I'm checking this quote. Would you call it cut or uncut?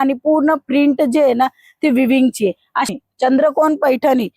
cut